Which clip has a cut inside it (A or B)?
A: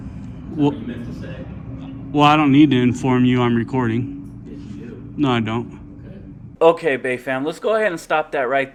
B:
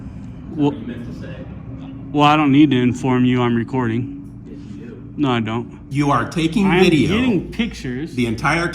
B